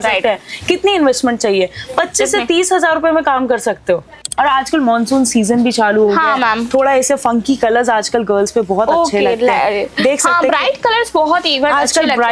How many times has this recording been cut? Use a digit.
1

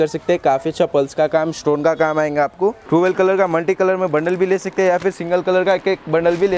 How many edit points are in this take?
1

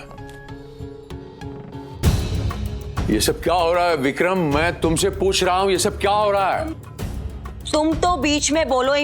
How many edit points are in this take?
1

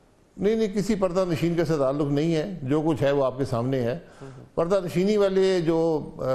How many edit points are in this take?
0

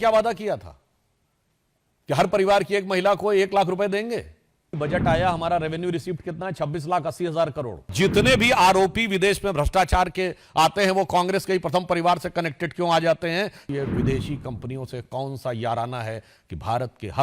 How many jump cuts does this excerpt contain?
3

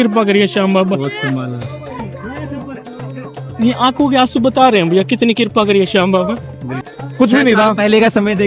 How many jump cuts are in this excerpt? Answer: 1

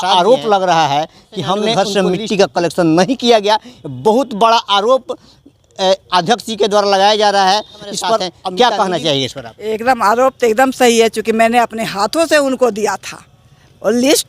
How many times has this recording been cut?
2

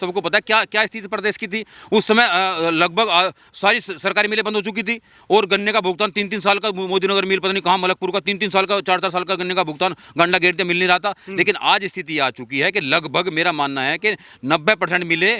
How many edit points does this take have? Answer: 0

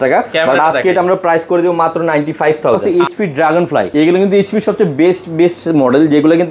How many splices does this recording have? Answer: 2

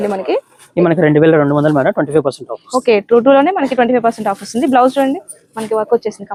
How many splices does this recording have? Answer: 0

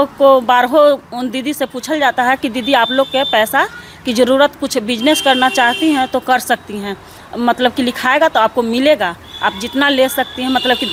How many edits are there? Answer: 0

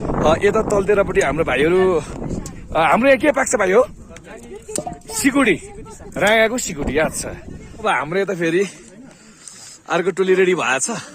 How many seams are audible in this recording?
1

